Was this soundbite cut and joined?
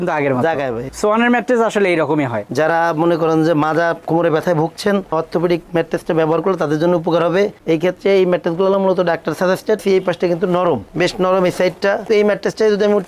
yes; 4 cuts; at 0.8 s, 2.4 s, 9.8 s, 12.1 s

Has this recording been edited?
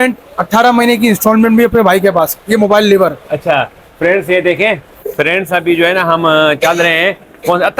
yes; 1 cut; at 4.9 s

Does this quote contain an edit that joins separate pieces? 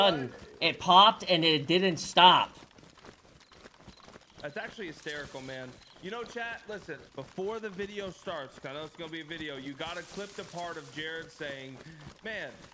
no; 0 cuts

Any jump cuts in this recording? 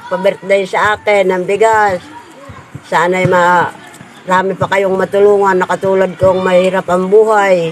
no; 0 cuts

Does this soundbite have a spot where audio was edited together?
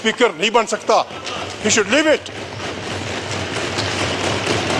no; 0 cuts

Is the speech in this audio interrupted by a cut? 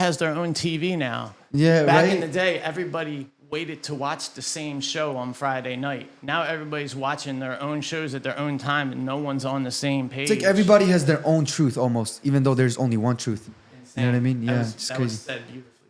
no; 0 cuts

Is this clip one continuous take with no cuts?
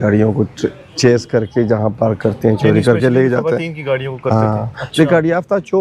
yes; 0 cuts

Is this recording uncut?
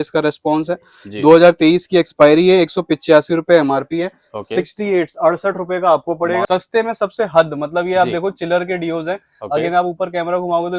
no; 1 cut; at 6.4 s

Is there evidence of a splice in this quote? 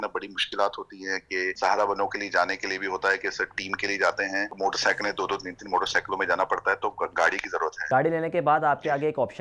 yes; 3 cuts; at 1.5 s, 4.5 s, 7.8 s

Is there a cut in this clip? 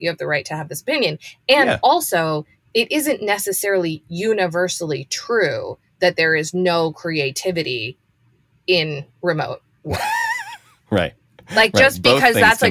no; 0 cuts

